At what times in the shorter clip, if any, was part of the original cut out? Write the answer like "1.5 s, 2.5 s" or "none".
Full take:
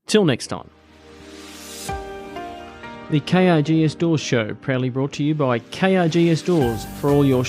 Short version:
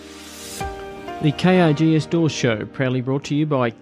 1.2 s